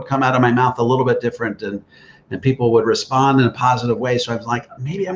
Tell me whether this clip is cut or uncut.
uncut